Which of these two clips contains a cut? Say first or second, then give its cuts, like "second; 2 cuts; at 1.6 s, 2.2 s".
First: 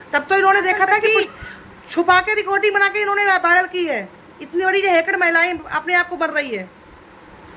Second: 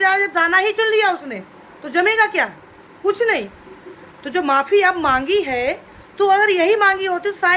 first; 1 cut; at 1.0 s